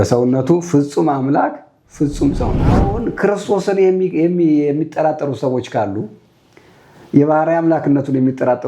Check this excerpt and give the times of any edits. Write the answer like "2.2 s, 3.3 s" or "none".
2.9 s